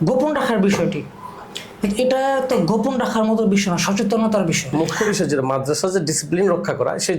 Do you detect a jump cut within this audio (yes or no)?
yes